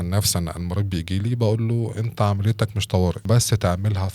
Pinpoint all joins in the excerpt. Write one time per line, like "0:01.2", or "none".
0:03.2

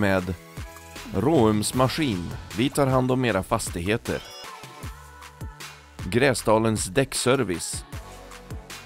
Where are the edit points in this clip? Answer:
0:07.7

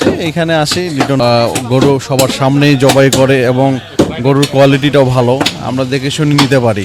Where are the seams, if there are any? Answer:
0:01.2

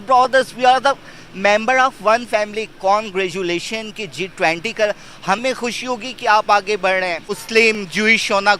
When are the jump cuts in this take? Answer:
0:07.4

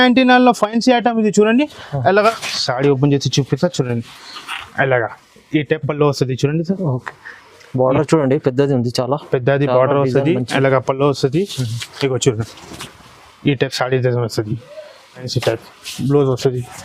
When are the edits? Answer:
0:02.3
0:15.3

